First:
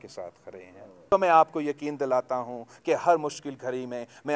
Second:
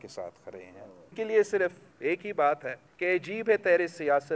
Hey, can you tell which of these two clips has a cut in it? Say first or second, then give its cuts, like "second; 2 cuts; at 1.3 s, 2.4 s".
first; 1 cut; at 1.1 s